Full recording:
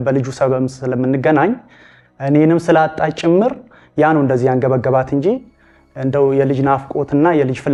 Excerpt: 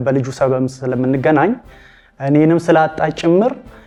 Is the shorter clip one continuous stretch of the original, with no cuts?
yes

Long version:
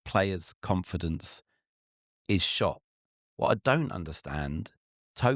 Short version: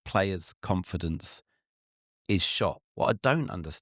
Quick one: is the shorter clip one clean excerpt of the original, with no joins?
no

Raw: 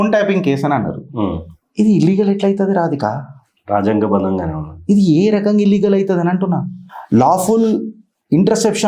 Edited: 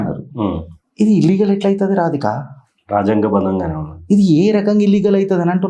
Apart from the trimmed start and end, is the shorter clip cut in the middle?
no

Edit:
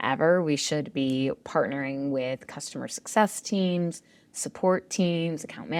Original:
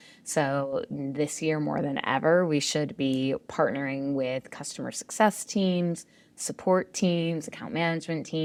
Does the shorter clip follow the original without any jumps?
yes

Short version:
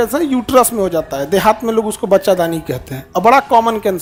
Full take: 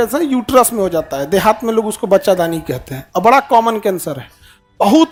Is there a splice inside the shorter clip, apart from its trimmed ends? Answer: no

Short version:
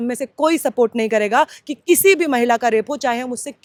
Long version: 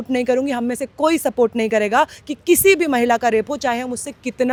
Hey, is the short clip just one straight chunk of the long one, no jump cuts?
yes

